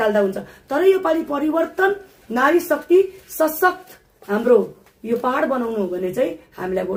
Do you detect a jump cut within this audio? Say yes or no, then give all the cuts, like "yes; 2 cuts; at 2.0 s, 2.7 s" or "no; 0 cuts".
no; 0 cuts